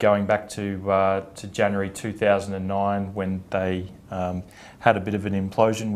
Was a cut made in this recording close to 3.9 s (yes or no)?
yes